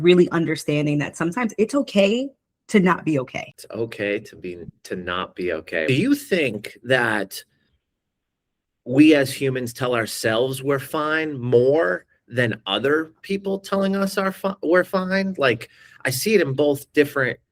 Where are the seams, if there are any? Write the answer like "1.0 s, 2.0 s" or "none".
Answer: 3.6 s, 5.9 s